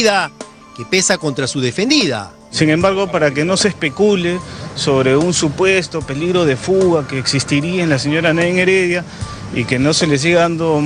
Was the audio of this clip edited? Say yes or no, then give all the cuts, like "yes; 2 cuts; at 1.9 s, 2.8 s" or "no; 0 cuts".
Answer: yes; 1 cut; at 2.3 s